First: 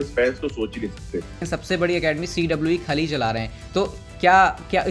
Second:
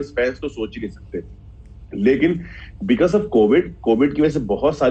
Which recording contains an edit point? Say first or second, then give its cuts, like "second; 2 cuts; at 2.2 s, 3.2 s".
first; 1 cut; at 1.4 s